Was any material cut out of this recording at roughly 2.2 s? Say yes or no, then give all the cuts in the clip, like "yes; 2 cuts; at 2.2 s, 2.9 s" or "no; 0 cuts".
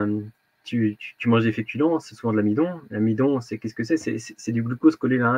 no; 0 cuts